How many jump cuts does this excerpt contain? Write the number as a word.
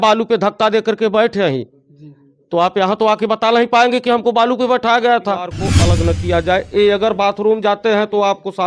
one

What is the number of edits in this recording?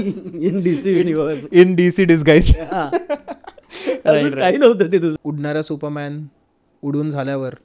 one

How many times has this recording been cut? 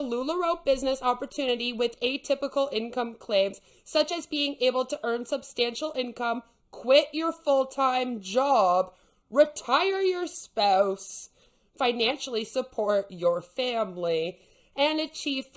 zero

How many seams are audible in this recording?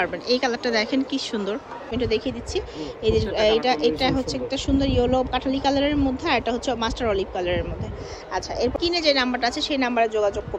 two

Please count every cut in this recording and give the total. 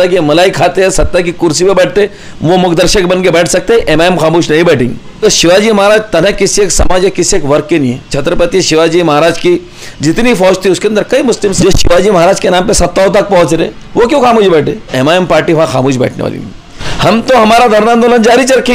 five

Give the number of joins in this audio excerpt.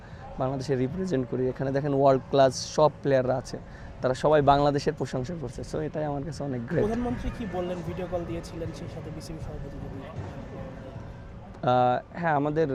zero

